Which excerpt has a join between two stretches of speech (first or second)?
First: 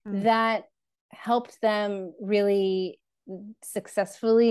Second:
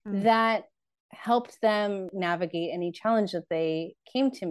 second